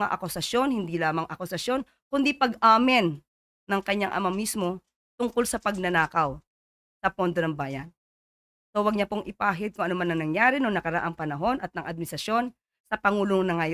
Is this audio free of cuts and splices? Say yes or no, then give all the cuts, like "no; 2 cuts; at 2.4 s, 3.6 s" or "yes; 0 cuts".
yes; 0 cuts